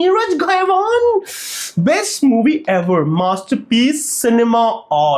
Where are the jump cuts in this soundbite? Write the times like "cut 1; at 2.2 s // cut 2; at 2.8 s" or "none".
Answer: none